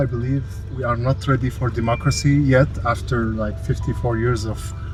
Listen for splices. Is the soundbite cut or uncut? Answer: uncut